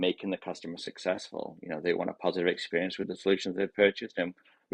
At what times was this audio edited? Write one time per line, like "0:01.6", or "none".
none